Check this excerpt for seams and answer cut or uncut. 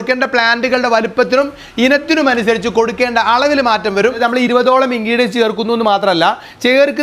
cut